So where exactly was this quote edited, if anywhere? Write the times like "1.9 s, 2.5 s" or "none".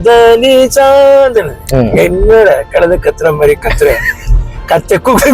none